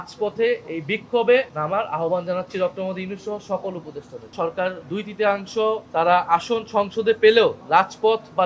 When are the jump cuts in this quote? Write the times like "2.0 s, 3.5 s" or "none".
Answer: 1.5 s, 4.3 s, 5.8 s, 7.6 s